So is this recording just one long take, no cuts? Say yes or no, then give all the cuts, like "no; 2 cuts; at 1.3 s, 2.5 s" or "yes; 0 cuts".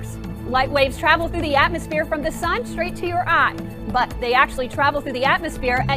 no; 1 cut; at 1.4 s